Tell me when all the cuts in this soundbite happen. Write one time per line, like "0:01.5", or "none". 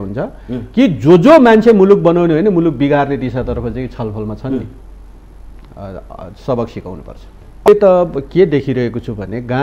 0:07.7